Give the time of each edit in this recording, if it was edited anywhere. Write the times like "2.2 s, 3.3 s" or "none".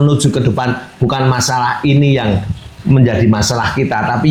none